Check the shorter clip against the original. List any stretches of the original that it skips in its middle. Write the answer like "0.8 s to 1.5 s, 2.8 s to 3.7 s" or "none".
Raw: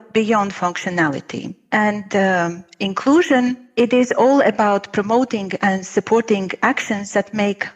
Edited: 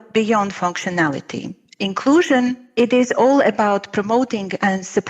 1.6 s to 2.6 s